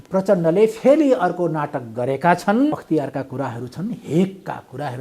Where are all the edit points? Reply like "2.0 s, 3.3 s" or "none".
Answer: 2.8 s